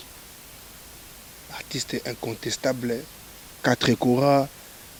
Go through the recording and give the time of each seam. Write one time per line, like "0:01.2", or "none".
none